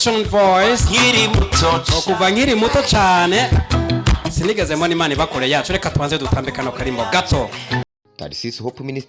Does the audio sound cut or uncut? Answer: cut